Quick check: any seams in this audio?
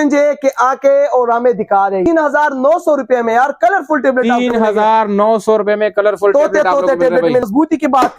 yes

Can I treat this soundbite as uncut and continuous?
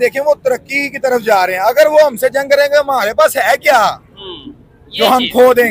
yes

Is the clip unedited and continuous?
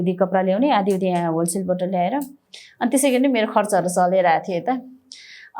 yes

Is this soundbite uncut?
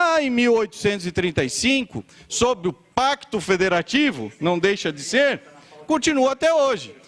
no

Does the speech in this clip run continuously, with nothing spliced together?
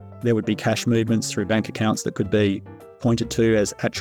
yes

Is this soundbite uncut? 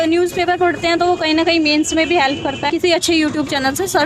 no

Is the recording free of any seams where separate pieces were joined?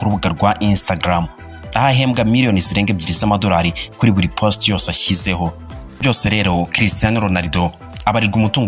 no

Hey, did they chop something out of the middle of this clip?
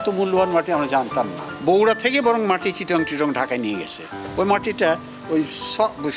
yes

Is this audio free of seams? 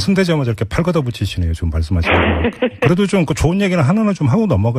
yes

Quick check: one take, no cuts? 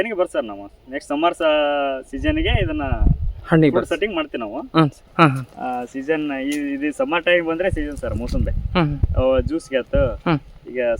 no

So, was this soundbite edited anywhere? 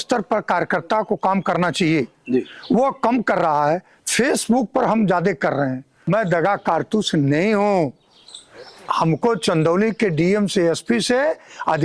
yes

